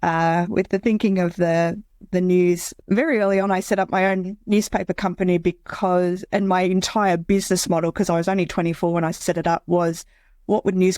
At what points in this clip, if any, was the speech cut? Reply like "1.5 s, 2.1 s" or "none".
2.7 s